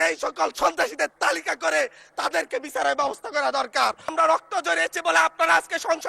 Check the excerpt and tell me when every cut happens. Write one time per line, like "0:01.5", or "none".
0:04.1